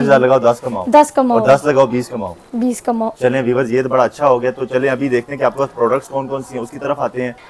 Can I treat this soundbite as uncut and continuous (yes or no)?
yes